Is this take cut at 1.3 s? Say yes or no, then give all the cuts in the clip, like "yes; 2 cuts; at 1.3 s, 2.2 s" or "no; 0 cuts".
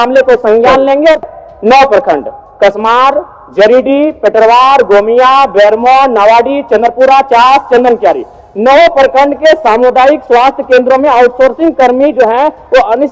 yes; 1 cut; at 1.3 s